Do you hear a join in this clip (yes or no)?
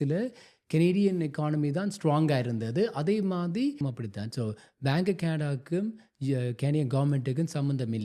yes